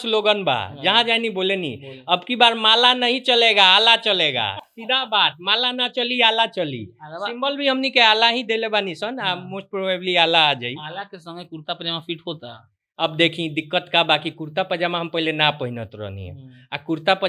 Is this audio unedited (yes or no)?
yes